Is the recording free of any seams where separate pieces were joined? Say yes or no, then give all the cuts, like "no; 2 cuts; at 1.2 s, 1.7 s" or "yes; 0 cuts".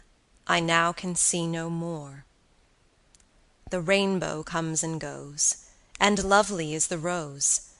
yes; 0 cuts